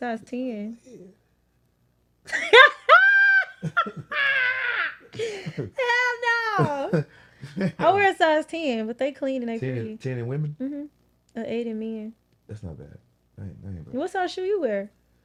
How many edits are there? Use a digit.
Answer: 0